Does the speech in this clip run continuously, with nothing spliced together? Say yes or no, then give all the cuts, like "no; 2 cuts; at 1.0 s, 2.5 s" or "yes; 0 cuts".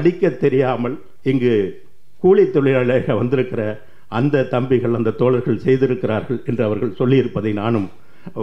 no; 1 cut; at 1.1 s